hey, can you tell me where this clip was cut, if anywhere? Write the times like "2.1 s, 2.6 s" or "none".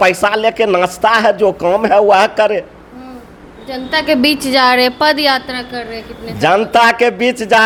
none